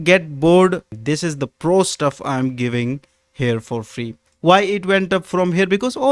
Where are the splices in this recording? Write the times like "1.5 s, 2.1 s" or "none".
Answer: 0.9 s, 4.2 s